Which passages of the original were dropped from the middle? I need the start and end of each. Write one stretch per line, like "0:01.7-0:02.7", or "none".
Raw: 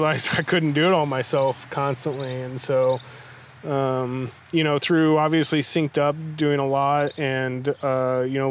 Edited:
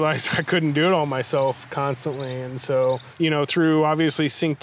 0:03.1-0:04.4